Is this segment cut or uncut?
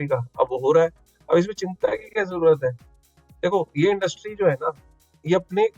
uncut